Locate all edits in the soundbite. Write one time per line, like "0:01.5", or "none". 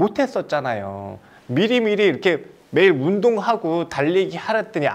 none